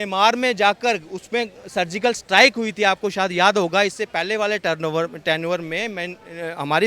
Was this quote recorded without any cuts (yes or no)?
yes